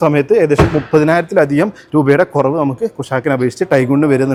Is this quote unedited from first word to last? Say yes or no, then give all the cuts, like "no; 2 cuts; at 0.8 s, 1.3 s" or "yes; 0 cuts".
yes; 0 cuts